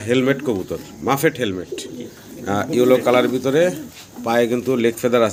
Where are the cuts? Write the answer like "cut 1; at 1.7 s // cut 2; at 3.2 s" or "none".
none

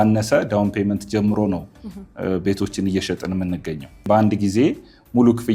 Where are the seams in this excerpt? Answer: cut 1; at 4.0 s

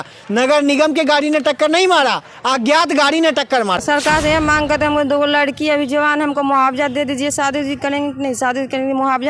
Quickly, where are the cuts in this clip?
cut 1; at 3.8 s

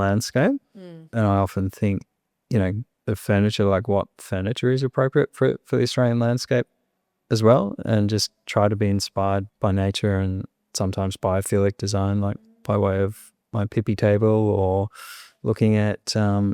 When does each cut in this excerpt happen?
cut 1; at 1.1 s // cut 2; at 9.5 s

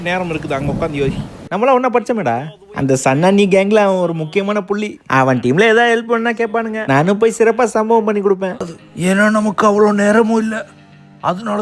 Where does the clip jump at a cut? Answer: cut 1; at 1.3 s // cut 2; at 8.7 s

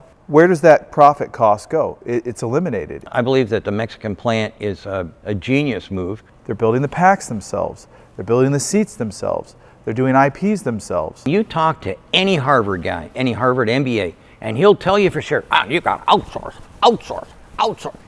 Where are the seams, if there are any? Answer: cut 1; at 3.0 s // cut 2; at 6.3 s // cut 3; at 11.3 s

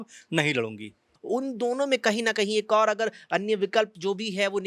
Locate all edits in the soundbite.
cut 1; at 1.1 s

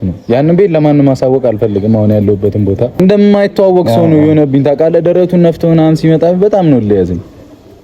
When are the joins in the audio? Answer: cut 1; at 3.0 s

